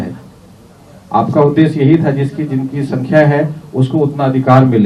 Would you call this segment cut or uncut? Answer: uncut